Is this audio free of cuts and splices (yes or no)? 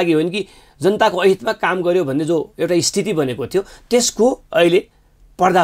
yes